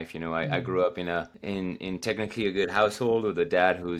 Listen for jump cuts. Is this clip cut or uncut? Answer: cut